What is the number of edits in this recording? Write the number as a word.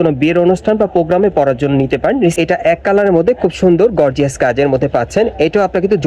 one